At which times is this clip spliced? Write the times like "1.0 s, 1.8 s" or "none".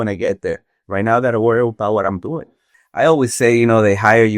2.7 s